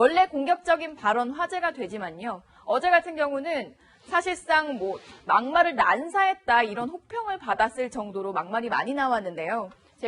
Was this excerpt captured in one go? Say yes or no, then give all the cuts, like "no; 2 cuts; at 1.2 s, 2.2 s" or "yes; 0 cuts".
yes; 0 cuts